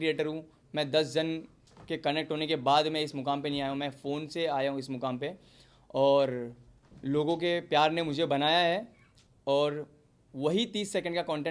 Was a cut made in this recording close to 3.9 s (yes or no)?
no